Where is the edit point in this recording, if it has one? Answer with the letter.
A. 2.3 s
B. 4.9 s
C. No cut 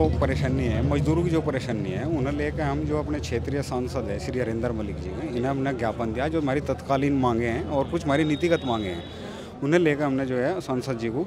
C